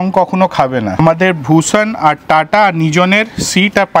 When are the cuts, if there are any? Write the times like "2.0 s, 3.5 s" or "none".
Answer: 1.0 s